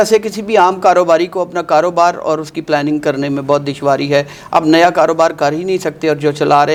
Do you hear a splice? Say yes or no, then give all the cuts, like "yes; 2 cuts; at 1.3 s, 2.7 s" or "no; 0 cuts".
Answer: no; 0 cuts